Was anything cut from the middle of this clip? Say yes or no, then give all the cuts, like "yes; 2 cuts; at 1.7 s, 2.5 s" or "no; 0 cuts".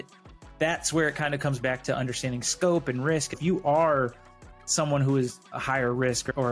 yes; 1 cut; at 3.4 s